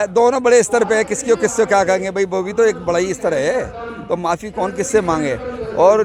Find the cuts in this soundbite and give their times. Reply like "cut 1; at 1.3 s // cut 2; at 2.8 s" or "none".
none